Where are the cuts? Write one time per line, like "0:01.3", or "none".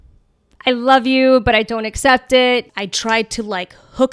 0:02.7